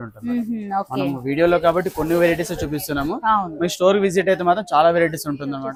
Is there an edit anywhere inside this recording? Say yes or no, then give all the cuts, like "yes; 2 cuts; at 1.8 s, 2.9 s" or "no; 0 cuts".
no; 0 cuts